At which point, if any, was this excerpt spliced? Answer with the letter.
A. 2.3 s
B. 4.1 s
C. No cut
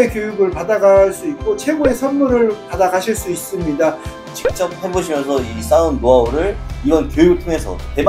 B